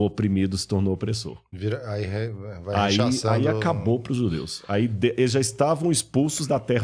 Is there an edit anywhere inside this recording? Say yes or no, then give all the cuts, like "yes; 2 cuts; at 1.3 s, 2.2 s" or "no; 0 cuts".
no; 0 cuts